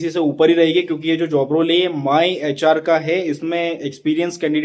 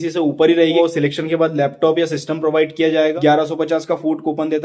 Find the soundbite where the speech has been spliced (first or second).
second